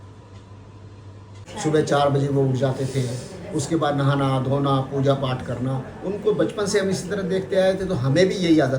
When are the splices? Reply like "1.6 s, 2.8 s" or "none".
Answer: 1.4 s